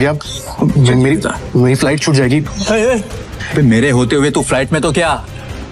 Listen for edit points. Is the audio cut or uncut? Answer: cut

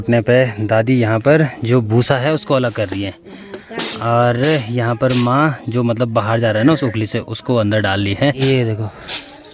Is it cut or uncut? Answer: uncut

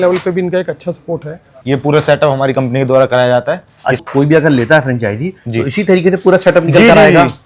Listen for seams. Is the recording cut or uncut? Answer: cut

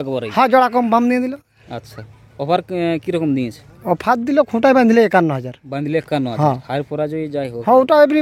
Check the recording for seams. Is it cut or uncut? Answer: uncut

